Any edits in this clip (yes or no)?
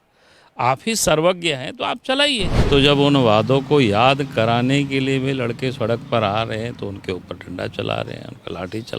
yes